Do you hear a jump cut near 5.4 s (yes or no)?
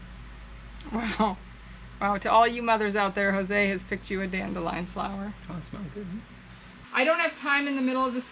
no